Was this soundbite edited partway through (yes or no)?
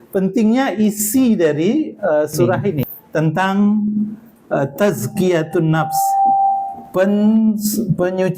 yes